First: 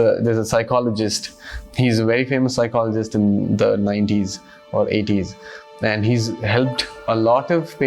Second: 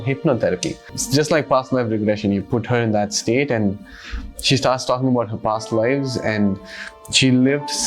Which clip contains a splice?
second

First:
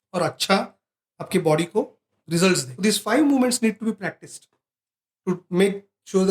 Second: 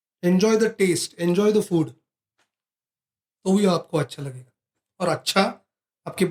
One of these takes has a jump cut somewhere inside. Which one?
first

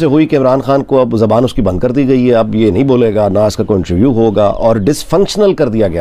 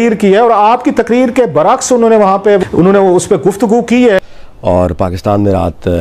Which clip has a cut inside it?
second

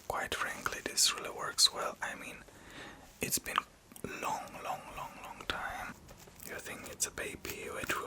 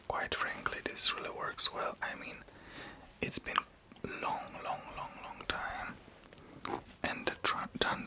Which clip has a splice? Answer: first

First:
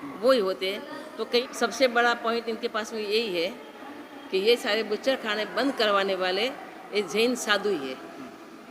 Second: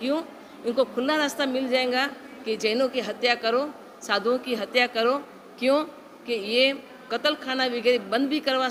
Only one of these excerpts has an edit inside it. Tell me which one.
first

